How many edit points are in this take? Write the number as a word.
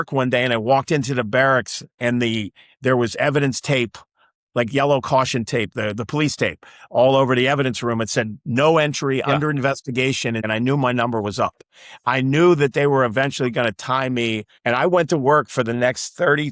two